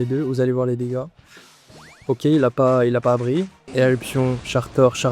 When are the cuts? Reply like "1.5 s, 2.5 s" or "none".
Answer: 3.6 s